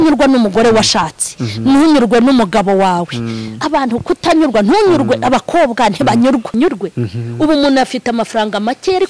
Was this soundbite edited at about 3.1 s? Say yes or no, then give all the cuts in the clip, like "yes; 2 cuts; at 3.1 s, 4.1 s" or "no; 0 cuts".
no; 1 cut; at 6.5 s